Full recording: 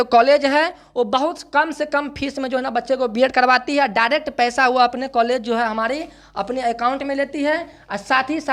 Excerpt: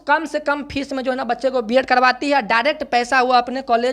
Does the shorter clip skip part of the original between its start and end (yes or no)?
no